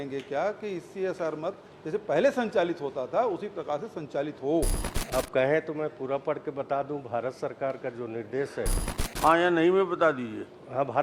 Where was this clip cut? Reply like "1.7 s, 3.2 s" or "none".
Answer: 4.9 s, 8.8 s